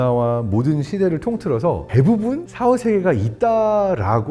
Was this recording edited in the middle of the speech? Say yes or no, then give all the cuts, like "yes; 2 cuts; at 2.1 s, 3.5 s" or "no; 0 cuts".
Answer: yes; 2 cuts; at 1.8 s, 3.3 s